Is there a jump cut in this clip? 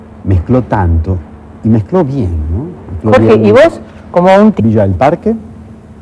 no; 0 cuts

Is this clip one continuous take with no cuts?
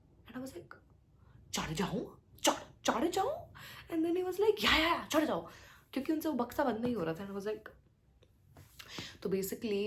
yes; 0 cuts

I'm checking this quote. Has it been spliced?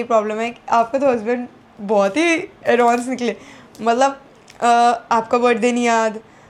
no; 0 cuts

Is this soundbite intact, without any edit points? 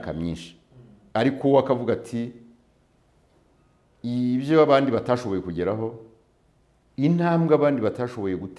yes; 0 cuts

